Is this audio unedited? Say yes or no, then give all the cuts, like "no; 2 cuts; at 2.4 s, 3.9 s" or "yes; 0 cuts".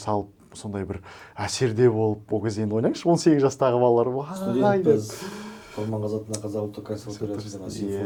yes; 0 cuts